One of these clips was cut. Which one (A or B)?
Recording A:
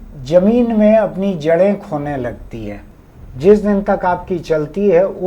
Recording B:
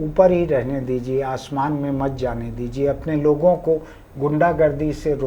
A